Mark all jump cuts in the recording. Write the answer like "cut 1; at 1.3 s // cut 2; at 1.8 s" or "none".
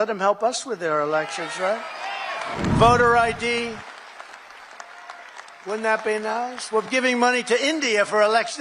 cut 1; at 2.6 s